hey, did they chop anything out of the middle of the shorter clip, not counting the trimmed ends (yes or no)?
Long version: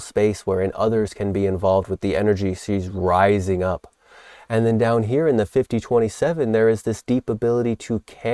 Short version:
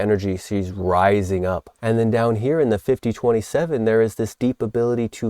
yes